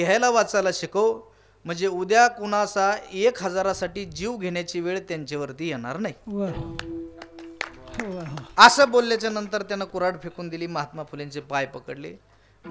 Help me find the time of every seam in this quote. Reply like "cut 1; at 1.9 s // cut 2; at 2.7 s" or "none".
none

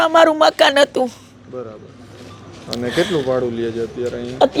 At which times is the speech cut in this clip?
none

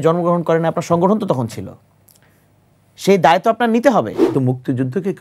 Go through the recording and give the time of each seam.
cut 1; at 4.3 s

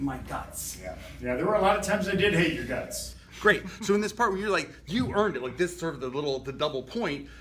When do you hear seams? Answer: none

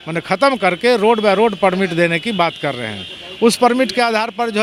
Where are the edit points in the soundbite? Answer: none

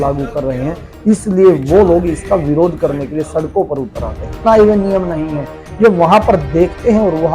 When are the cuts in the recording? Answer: cut 1; at 4.4 s

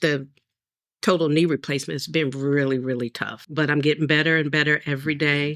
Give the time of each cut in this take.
cut 1; at 3.4 s

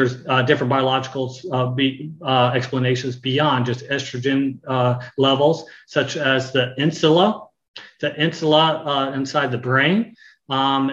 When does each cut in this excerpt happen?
none

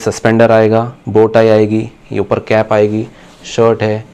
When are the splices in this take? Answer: cut 1; at 1.0 s

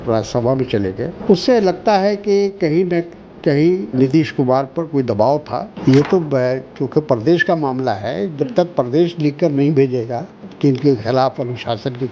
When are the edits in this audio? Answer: cut 1; at 1.1 s // cut 2; at 3.9 s // cut 3; at 5.8 s // cut 4; at 10.4 s

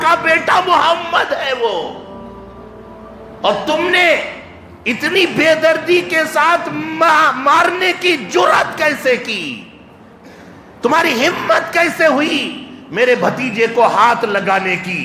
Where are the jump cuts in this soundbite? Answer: none

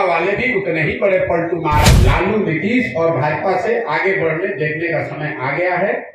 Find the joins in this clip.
cut 1; at 1.9 s

